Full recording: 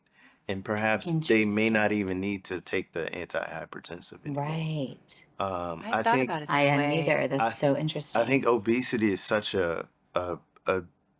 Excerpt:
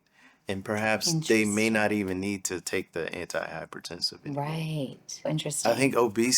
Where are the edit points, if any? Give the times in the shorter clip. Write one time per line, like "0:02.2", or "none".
0:05.3